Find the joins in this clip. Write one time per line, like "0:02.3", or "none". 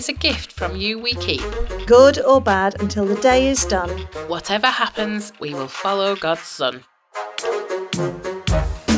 0:07.4